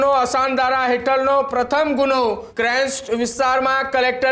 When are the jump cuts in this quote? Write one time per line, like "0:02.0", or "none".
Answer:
0:02.5